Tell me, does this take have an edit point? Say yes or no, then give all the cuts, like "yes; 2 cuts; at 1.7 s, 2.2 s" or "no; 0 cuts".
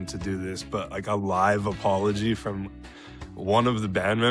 no; 0 cuts